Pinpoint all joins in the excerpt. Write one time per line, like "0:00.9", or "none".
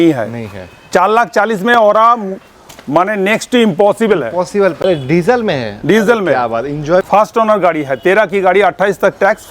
0:04.8
0:07.1